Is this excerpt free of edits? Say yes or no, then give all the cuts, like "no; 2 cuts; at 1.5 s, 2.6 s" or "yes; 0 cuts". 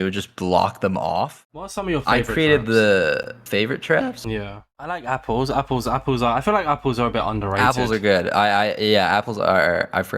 no; 2 cuts; at 1.6 s, 4.7 s